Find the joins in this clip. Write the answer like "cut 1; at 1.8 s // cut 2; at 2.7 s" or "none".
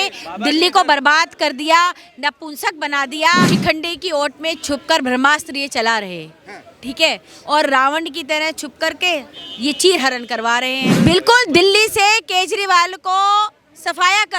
cut 1; at 3.5 s // cut 2; at 10.8 s